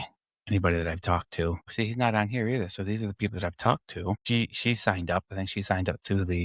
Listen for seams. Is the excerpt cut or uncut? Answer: uncut